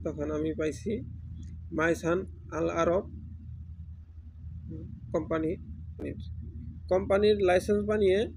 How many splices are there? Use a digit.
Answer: 1